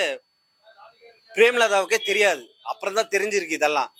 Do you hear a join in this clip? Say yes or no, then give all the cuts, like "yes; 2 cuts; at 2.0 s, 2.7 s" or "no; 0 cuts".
no; 0 cuts